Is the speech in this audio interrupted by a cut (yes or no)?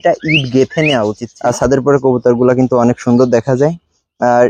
yes